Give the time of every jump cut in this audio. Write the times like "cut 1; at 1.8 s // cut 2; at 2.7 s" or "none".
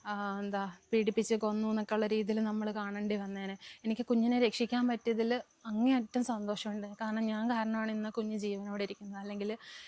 none